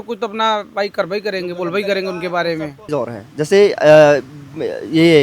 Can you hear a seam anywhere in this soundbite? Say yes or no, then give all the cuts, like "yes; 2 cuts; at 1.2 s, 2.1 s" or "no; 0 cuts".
no; 0 cuts